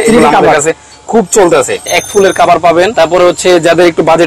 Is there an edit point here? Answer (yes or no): yes